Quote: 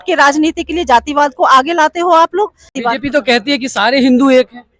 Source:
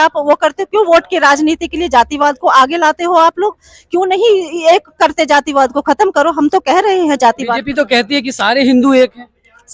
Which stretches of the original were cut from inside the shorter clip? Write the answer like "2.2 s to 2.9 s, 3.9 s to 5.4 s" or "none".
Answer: 3.8 s to 7.4 s